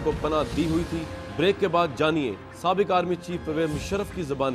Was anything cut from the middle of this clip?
no; 0 cuts

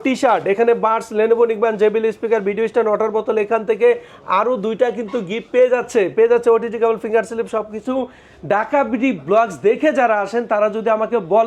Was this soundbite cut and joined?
no; 0 cuts

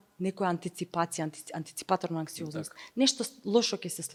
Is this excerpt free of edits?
yes; 0 cuts

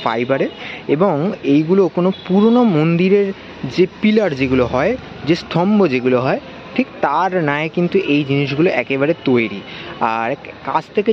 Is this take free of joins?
yes; 0 cuts

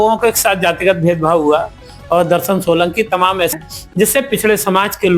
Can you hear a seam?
yes; 1 cut; at 3.5 s

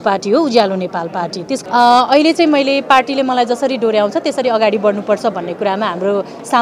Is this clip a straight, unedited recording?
no; 1 cut; at 1.6 s

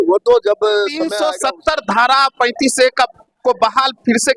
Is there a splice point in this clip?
yes; 1 cut; at 1.0 s

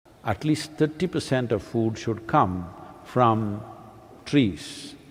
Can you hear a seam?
no; 0 cuts

